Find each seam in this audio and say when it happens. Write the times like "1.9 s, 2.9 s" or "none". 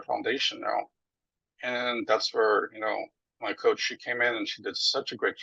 none